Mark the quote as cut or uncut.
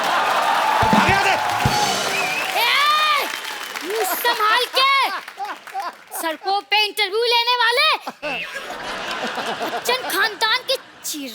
uncut